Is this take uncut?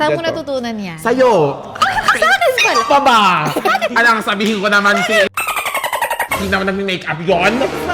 yes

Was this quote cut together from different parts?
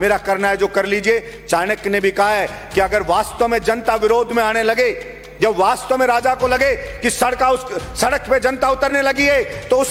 no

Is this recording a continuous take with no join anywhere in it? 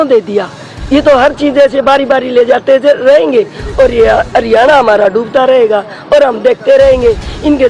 yes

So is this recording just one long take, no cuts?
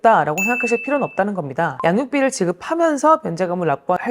no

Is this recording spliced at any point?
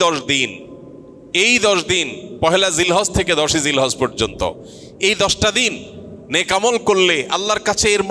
no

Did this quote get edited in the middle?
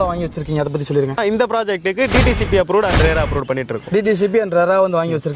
no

